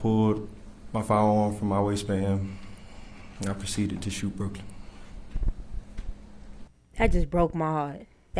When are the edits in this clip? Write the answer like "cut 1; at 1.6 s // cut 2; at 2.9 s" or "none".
none